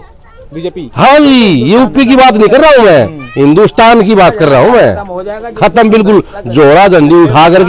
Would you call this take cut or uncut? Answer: uncut